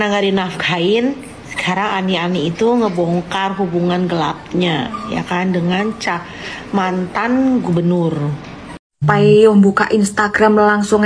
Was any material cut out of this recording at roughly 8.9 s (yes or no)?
yes